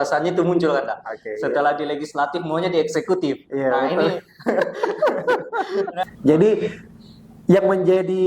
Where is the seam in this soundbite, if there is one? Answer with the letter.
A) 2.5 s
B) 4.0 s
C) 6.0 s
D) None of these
C